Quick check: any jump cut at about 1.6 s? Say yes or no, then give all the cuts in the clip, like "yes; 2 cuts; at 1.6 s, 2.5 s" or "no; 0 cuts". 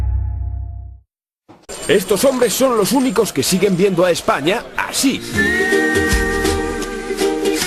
no; 0 cuts